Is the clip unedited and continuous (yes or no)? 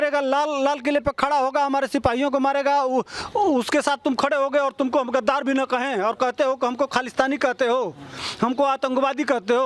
yes